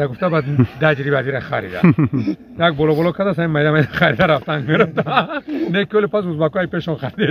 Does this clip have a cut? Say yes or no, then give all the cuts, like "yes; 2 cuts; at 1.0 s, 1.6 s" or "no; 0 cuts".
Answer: no; 0 cuts